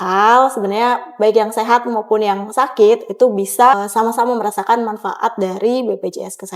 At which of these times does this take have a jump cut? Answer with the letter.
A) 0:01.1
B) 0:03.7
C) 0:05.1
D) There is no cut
B